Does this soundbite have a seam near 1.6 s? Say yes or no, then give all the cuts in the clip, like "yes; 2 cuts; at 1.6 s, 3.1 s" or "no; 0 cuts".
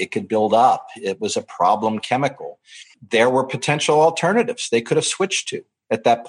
no; 1 cut; at 2.9 s